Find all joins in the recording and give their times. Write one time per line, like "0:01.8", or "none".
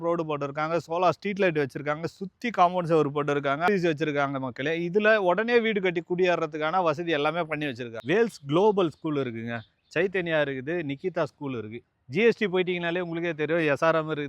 0:03.7
0:07.9
0:11.9